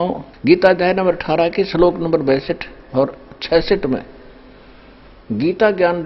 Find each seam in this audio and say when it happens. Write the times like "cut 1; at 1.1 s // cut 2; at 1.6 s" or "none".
none